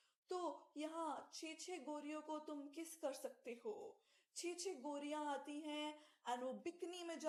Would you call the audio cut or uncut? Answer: uncut